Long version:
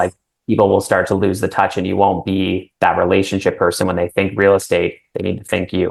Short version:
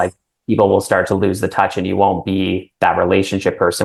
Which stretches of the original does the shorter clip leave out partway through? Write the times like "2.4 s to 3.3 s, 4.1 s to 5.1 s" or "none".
none